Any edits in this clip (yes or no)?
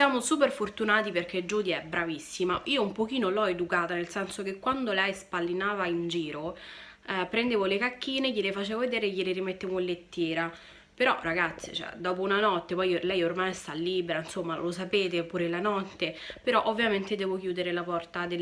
no